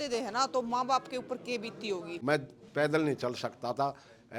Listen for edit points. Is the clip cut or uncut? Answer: cut